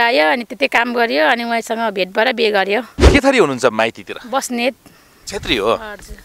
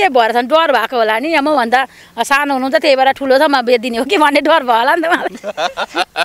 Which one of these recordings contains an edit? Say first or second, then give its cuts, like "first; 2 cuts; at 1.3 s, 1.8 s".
first; 1 cut; at 3.1 s